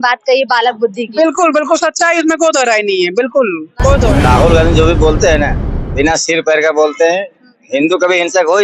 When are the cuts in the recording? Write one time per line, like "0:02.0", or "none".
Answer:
0:04.1